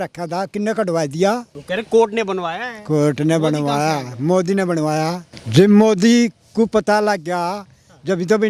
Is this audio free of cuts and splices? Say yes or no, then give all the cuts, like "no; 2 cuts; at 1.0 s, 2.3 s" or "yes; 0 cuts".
no; 2 cuts; at 1.5 s, 5.3 s